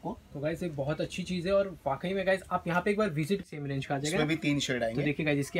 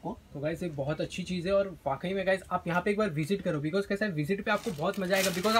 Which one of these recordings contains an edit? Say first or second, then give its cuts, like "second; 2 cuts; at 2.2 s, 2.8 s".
first; 1 cut; at 3.5 s